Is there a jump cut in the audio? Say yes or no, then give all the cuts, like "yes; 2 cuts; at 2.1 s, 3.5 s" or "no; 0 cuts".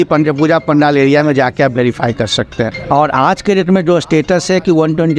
no; 0 cuts